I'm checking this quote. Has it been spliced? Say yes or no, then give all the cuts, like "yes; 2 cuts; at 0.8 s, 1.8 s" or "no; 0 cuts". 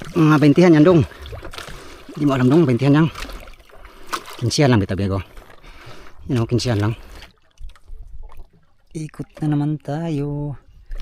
yes; 1 cut; at 7.6 s